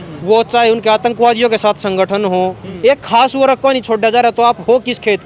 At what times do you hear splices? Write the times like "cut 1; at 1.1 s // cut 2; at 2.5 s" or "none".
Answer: cut 1; at 2.7 s